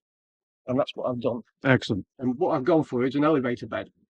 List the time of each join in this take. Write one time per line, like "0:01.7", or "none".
0:02.1